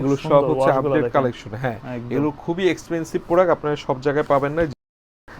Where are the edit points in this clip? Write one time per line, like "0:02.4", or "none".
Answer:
none